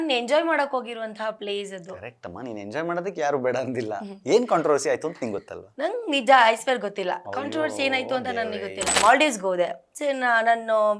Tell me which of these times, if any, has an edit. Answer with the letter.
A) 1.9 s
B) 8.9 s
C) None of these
B